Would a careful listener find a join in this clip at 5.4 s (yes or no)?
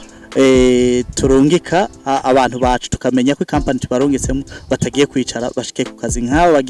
no